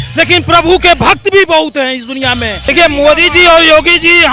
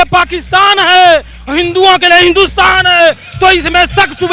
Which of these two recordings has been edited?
first; 1 cut; at 2.7 s

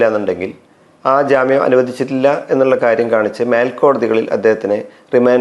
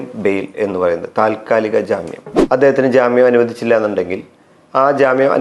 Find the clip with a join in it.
second; 1 cut; at 2.3 s

